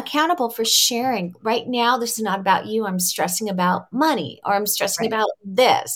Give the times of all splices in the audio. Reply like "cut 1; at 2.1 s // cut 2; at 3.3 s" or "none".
none